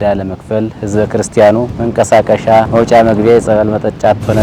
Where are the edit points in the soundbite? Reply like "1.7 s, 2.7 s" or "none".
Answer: 1.8 s, 2.7 s